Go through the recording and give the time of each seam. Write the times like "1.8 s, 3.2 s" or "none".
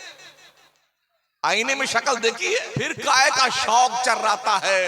2.8 s